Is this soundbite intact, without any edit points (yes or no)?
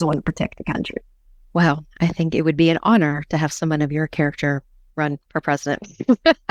yes